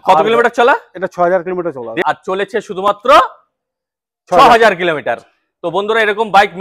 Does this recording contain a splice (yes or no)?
no